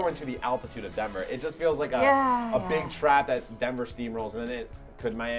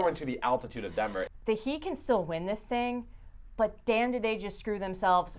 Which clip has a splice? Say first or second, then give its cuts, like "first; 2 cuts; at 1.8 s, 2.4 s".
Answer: second; 1 cut; at 1.2 s